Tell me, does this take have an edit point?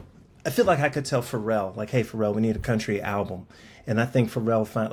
no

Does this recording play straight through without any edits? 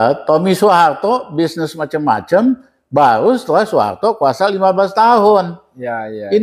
yes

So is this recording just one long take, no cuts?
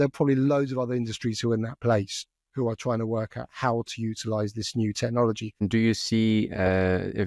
no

